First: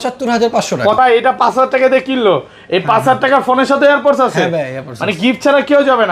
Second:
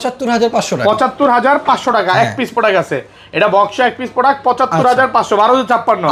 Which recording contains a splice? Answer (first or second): first